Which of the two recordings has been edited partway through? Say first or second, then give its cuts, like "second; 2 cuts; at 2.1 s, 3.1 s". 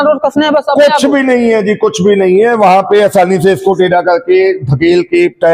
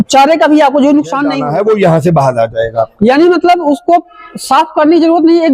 second; 1 cut; at 1.3 s